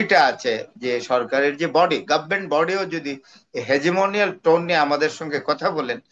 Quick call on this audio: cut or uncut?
uncut